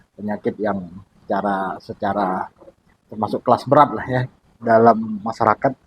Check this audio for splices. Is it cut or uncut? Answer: cut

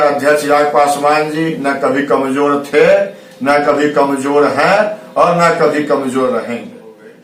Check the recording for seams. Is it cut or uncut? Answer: uncut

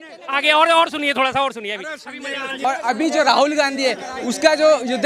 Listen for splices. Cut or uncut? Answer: cut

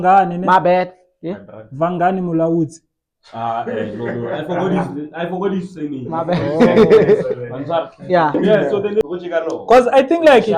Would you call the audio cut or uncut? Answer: cut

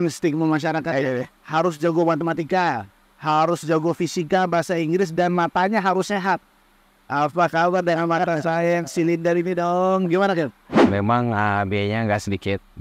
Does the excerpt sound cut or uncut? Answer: cut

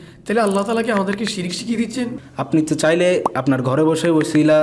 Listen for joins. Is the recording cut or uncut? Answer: cut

